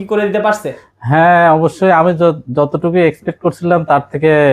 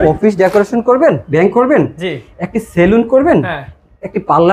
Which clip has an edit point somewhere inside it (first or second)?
second